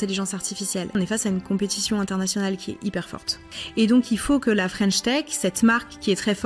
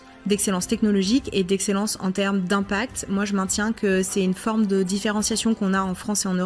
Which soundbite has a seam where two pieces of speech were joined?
first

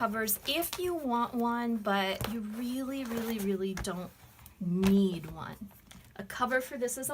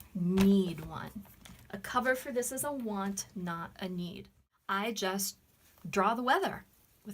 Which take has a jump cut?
second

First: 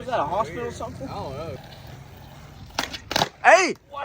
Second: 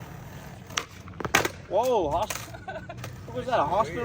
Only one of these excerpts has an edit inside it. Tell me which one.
first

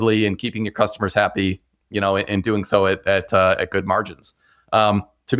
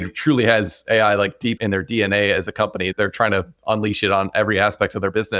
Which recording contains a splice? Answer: second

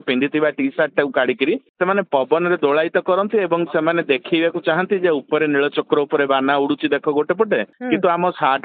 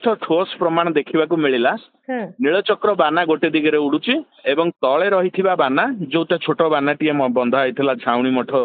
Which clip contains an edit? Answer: first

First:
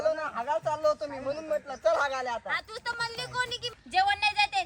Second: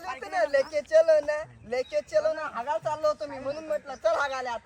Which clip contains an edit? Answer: first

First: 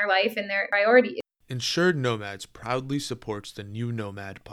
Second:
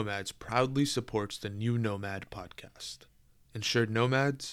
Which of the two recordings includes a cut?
first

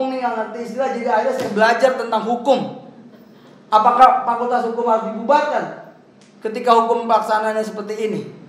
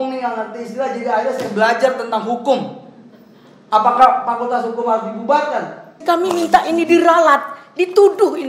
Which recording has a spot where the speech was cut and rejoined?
second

